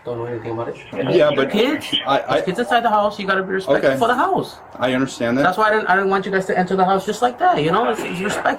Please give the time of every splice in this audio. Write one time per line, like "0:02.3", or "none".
0:00.9